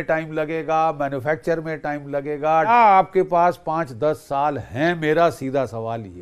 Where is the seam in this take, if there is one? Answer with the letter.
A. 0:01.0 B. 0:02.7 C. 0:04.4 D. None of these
B